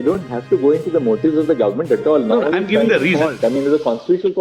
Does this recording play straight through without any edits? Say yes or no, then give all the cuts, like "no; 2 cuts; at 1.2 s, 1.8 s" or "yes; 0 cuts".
yes; 0 cuts